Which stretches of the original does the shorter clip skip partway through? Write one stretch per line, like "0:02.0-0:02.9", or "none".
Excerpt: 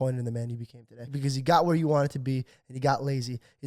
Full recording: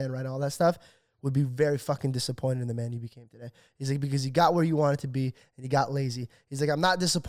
0:03.6-0:04.0